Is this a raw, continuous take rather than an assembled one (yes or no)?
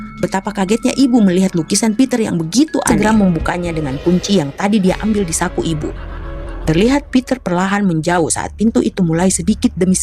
no